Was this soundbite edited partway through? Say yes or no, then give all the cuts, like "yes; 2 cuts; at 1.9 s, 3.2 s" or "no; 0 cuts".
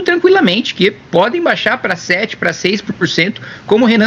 no; 0 cuts